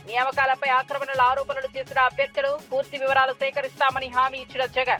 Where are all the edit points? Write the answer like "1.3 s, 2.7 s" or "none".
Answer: none